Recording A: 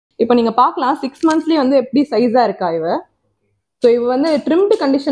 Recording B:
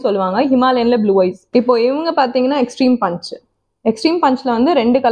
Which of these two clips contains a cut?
B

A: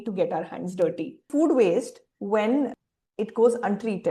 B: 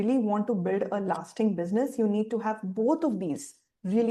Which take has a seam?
A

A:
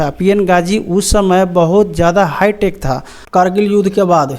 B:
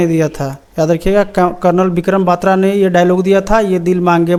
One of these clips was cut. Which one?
A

